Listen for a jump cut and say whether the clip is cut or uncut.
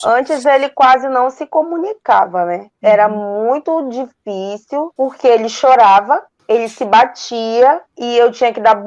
cut